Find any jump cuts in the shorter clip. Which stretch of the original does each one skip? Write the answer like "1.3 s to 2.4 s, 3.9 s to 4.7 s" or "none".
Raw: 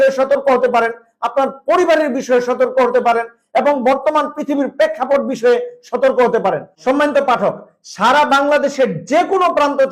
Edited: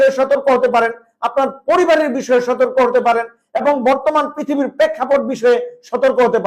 none